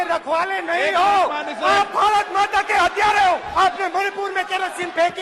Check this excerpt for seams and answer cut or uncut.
cut